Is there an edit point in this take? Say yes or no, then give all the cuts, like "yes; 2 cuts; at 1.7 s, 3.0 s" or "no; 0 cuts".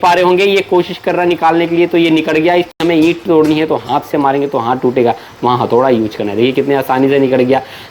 yes; 1 cut; at 2.8 s